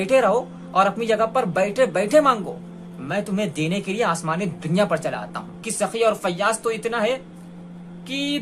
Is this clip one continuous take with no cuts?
no; 1 cut; at 5.7 s

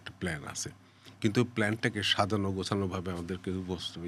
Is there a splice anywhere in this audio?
no; 0 cuts

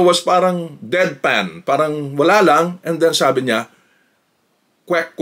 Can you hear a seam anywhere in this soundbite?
no; 0 cuts

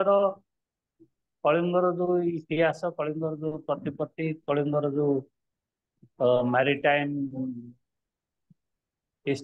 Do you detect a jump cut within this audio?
no; 0 cuts

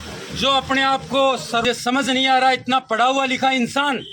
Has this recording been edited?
yes; 1 cut; at 1.6 s

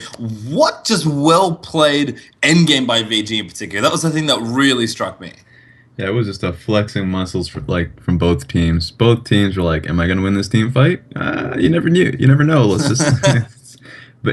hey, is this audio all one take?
no; 1 cut; at 12.4 s

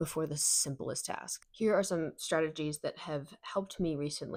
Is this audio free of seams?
yes; 0 cuts

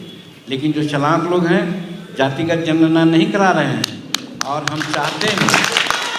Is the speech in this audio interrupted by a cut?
no; 0 cuts

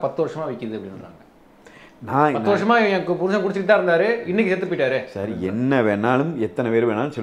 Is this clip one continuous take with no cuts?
yes; 0 cuts

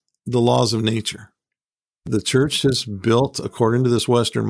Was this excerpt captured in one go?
no; 1 cut; at 2.1 s

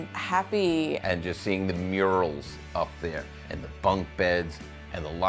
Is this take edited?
no; 0 cuts

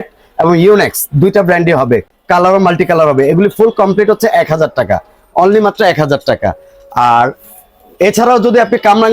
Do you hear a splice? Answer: no; 0 cuts

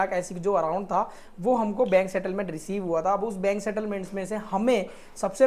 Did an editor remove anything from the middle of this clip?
no; 0 cuts

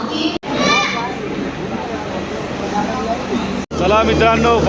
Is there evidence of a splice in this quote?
no; 0 cuts

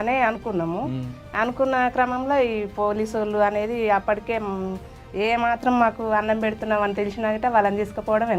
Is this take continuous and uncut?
yes; 0 cuts

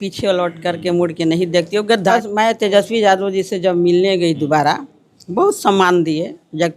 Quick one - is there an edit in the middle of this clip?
yes; 1 cut; at 2.1 s

